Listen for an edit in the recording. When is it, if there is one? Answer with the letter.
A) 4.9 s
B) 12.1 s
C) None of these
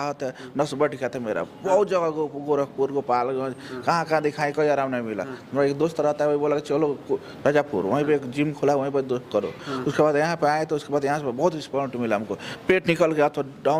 C